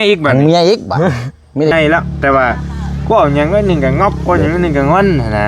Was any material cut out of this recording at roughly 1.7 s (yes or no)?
yes